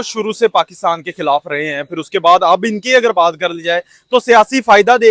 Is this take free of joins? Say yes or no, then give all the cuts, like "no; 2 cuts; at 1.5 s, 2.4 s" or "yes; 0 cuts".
yes; 0 cuts